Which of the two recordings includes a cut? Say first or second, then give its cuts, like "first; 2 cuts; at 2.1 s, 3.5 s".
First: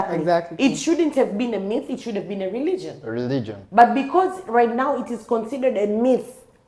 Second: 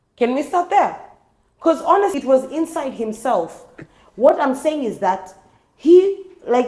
second; 1 cut; at 2.2 s